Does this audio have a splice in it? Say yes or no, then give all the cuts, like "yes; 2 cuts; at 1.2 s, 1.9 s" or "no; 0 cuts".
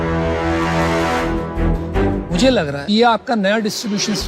no; 0 cuts